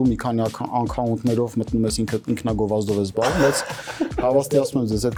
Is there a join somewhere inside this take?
no; 0 cuts

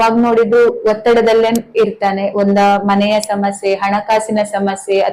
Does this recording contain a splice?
no; 0 cuts

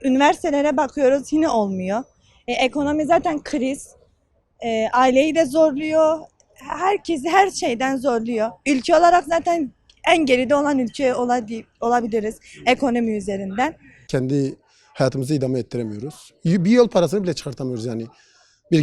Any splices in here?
yes; 1 cut; at 13.9 s

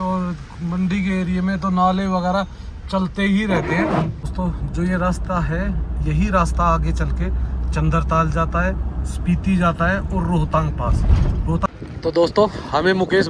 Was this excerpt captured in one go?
no; 2 cuts; at 4.2 s, 11.7 s

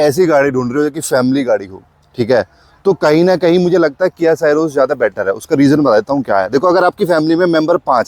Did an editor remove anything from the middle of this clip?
no; 0 cuts

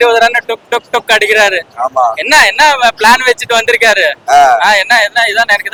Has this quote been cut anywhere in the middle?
no; 0 cuts

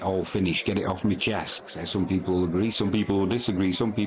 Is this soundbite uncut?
no; 1 cut; at 1.6 s

